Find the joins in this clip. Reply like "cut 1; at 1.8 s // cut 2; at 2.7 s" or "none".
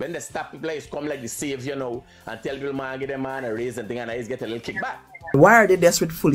cut 1; at 5.3 s